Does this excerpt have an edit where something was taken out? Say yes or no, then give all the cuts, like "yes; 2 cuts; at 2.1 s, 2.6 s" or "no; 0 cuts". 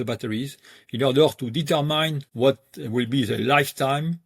yes; 1 cut; at 2.2 s